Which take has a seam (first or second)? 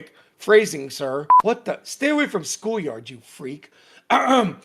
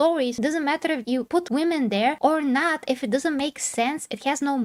first